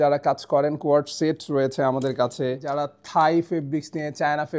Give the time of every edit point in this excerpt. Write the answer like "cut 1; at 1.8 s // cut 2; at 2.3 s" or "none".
cut 1; at 2.7 s